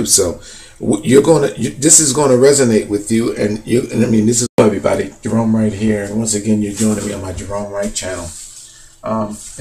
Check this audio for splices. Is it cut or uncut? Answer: uncut